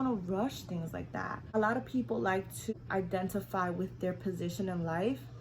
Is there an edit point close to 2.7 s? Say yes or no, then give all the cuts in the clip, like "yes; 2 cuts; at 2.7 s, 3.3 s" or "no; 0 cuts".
yes; 2 cuts; at 1.5 s, 2.7 s